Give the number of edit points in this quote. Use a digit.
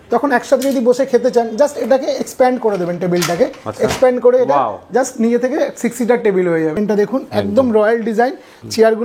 1